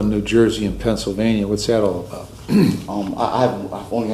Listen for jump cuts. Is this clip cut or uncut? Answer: uncut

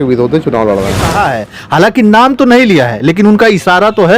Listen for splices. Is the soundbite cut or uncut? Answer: cut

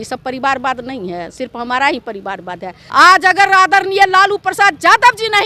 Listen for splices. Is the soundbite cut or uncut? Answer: cut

